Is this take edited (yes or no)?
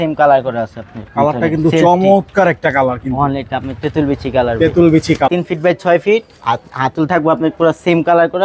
yes